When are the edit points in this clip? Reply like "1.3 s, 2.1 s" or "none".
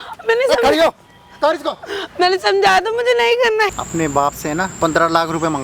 3.7 s, 4.7 s